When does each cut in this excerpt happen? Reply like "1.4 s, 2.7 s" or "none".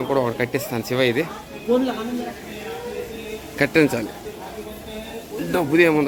none